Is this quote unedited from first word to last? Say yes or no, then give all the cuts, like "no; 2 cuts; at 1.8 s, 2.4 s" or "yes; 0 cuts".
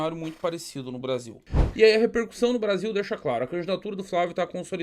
no; 1 cut; at 1.5 s